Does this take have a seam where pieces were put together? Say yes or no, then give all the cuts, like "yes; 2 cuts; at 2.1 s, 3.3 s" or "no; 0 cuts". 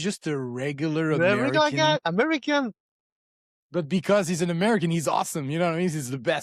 no; 0 cuts